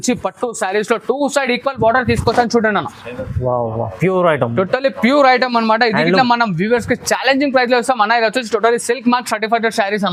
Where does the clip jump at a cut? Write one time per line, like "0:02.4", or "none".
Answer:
none